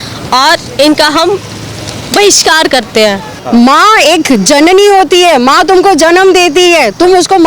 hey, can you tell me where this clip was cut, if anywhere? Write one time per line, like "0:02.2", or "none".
0:03.4